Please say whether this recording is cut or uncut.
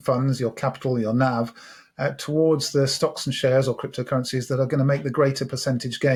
uncut